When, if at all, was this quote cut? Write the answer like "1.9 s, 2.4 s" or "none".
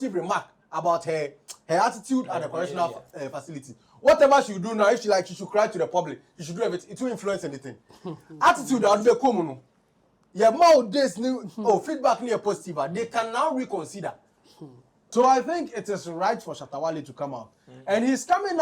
15.1 s